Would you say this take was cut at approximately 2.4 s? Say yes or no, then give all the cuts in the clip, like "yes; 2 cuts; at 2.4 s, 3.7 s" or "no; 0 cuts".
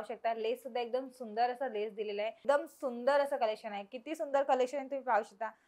yes; 1 cut; at 2.4 s